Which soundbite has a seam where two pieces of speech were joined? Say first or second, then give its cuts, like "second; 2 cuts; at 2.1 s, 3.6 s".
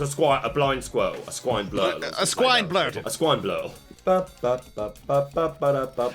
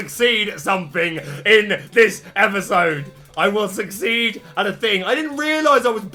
first; 2 cuts; at 3.0 s, 3.8 s